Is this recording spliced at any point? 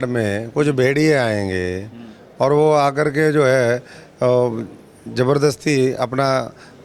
no; 0 cuts

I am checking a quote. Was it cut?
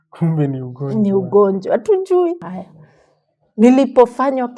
yes; 1 cut; at 2.4 s

